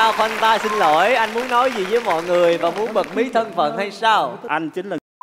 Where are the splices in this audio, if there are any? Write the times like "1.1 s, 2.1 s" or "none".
none